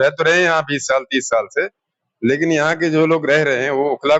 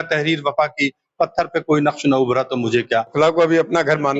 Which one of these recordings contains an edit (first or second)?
second